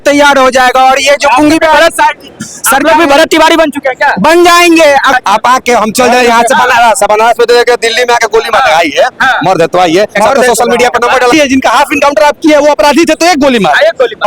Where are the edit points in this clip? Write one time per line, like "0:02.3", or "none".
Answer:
0:05.1
0:11.3